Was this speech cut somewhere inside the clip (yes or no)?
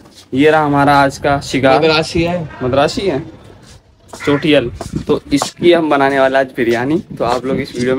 no